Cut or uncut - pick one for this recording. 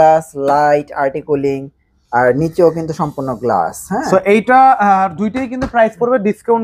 uncut